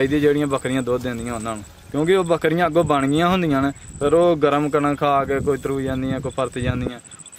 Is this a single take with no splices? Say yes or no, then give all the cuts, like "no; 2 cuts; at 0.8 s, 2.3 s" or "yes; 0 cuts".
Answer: yes; 0 cuts